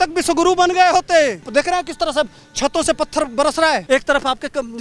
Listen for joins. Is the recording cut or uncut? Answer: cut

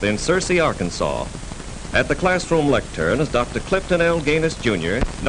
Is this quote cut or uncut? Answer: cut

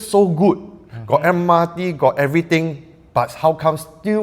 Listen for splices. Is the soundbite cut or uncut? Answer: uncut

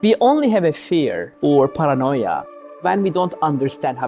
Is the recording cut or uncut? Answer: cut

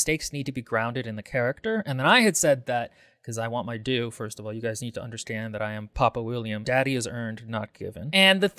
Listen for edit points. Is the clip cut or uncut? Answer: cut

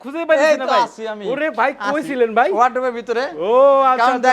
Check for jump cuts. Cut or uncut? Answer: uncut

